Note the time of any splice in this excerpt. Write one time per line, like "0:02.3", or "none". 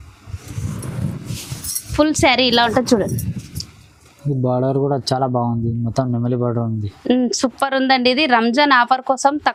none